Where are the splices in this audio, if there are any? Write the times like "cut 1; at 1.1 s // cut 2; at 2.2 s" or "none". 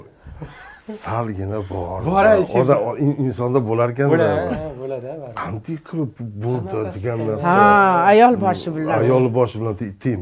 none